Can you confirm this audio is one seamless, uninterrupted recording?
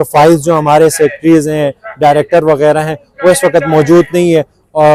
yes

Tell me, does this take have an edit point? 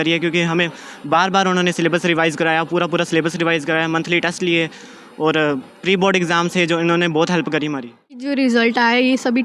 yes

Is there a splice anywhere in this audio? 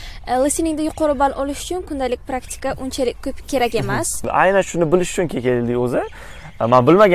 yes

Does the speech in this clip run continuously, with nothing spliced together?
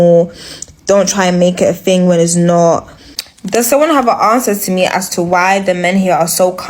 yes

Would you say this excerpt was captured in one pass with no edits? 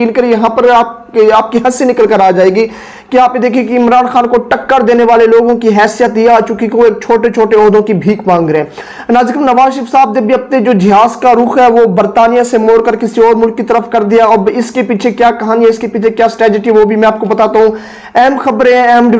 yes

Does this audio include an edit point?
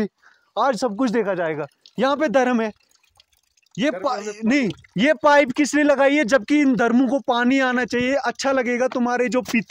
no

